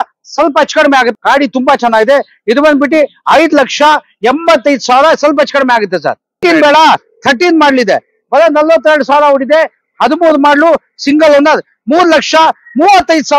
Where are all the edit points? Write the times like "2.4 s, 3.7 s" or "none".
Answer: 1.1 s, 6.4 s